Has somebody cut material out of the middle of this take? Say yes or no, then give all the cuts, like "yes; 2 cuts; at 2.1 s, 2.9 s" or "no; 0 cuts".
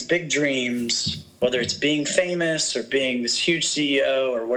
no; 0 cuts